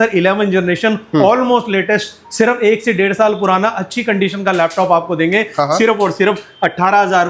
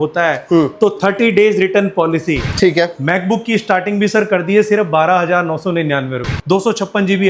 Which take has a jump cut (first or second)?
second